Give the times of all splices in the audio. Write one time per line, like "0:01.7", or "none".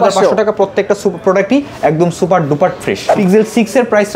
0:03.0